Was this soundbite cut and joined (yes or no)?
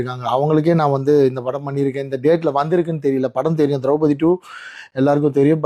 no